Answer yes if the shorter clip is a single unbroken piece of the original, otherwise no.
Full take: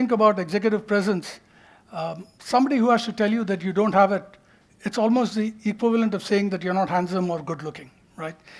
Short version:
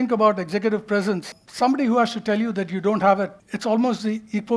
no